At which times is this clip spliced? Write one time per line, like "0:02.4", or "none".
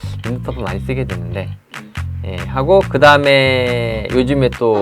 none